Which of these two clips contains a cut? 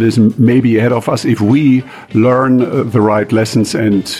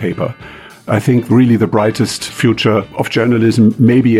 second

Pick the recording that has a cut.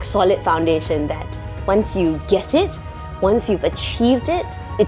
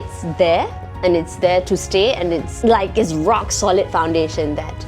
second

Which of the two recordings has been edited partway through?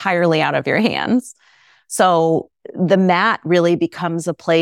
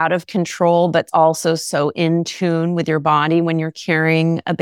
second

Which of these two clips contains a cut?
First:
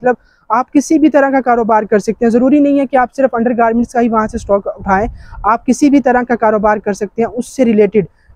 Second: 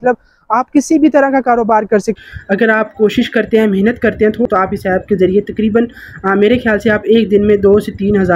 second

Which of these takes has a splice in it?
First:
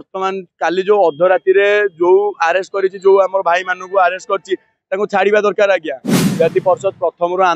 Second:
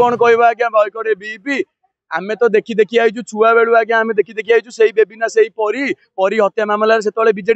first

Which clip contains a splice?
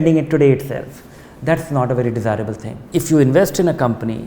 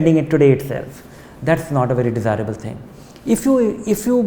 first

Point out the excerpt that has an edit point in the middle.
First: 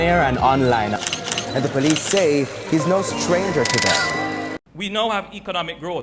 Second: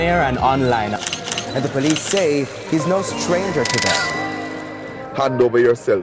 first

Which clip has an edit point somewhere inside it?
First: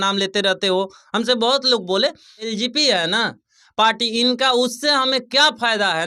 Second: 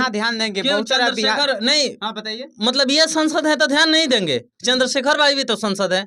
first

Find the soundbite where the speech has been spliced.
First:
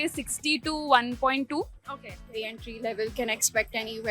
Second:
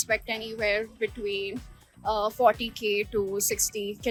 first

